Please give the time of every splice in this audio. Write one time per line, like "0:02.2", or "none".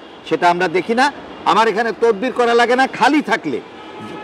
none